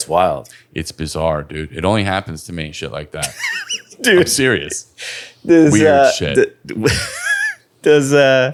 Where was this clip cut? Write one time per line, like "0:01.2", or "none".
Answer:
none